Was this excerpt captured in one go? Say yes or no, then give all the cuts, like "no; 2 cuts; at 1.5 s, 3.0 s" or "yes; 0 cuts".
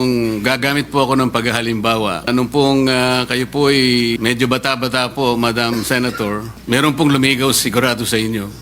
no; 3 cuts; at 2.3 s, 4.2 s, 6.5 s